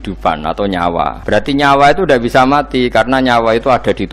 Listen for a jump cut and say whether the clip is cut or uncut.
cut